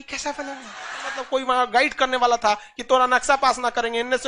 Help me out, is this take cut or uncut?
cut